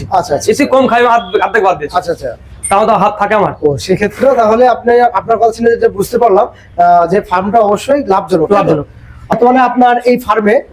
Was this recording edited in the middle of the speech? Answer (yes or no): yes